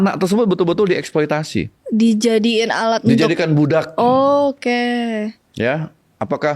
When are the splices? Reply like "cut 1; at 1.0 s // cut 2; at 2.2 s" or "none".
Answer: cut 1; at 1.8 s